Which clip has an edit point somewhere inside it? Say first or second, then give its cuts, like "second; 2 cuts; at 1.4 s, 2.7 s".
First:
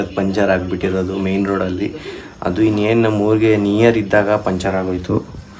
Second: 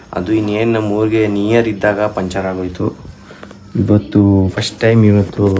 second; 1 cut; at 4.5 s